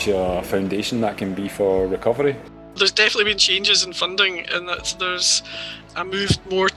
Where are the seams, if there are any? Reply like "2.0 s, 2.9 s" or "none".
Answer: 2.5 s, 5.8 s